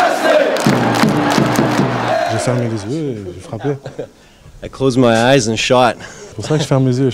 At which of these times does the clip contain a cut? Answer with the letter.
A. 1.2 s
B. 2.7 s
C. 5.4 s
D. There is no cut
B